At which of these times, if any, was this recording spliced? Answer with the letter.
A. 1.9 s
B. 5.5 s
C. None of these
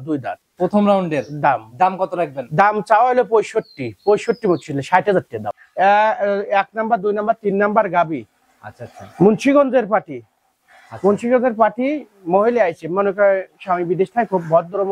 B